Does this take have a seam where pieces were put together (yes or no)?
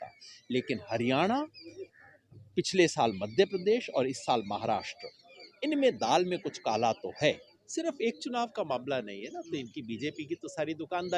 yes